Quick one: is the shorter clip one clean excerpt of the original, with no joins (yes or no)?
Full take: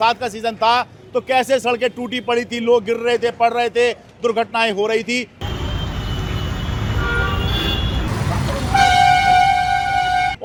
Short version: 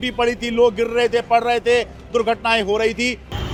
yes